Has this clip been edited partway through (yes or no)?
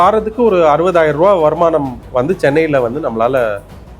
yes